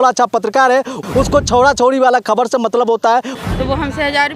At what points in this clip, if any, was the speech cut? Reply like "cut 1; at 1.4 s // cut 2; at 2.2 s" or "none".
cut 1; at 1.0 s // cut 2; at 3.3 s